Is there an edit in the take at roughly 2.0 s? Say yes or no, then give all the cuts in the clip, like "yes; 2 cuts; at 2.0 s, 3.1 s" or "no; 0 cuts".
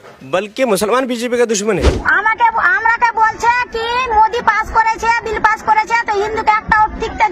yes; 1 cut; at 2.0 s